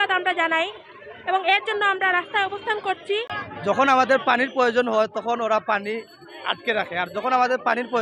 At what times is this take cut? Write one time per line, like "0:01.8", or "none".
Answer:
0:03.4